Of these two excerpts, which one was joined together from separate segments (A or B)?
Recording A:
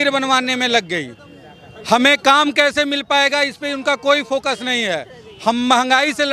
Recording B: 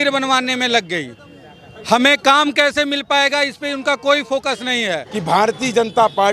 B